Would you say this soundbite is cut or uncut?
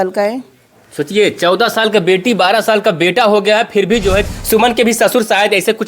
cut